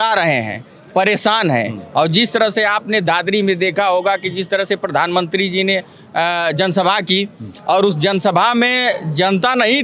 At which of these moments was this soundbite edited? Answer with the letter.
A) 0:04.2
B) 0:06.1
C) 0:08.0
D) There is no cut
D